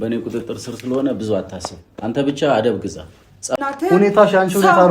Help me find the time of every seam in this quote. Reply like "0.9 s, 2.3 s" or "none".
3.5 s